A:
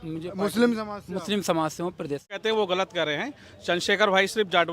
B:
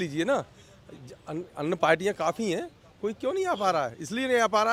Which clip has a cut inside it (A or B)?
A